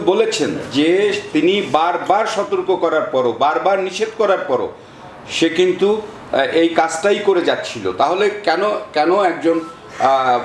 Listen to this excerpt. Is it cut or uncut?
uncut